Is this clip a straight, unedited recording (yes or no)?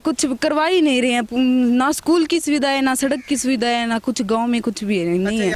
yes